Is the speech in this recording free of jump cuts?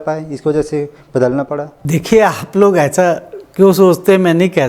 no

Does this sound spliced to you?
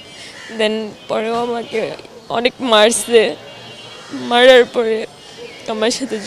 no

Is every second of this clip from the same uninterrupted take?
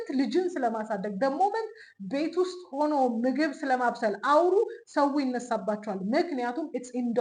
yes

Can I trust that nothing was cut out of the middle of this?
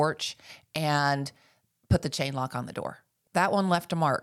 no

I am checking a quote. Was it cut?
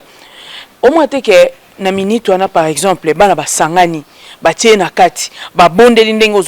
no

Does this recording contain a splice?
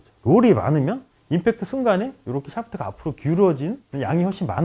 no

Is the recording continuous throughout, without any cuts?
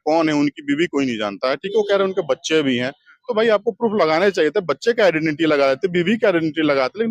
yes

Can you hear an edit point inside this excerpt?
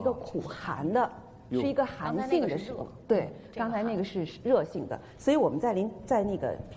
no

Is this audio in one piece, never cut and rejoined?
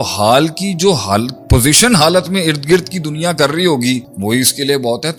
yes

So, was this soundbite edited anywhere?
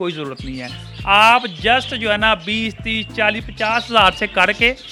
no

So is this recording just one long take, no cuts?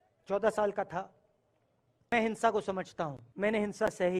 no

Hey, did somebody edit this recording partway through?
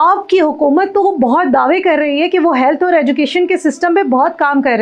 no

